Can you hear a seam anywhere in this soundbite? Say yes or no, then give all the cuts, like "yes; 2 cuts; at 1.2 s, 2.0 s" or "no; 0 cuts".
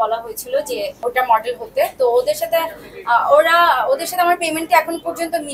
yes; 1 cut; at 0.9 s